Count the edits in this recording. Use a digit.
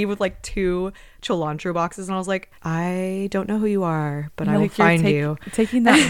1